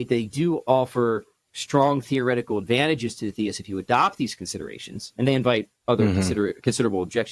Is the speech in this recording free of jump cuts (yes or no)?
yes